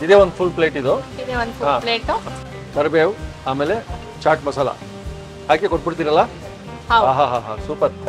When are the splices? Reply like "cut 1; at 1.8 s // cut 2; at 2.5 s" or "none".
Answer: none